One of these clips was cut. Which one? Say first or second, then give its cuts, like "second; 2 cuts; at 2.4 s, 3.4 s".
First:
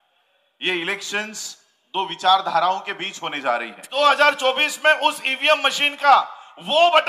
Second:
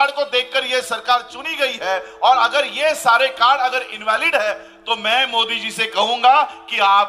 first; 1 cut; at 3.8 s